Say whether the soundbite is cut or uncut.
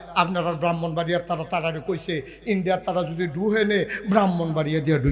uncut